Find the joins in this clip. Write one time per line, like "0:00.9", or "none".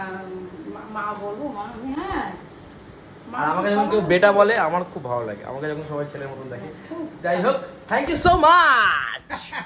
none